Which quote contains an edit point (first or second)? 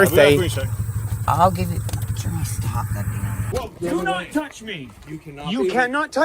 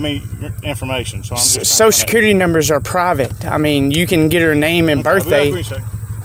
first